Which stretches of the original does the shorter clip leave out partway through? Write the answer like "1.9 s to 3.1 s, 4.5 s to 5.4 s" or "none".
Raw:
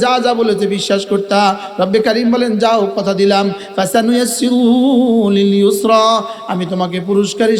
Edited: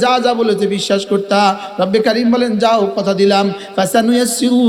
none